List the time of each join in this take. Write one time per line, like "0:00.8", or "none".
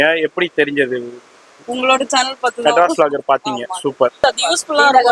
0:04.2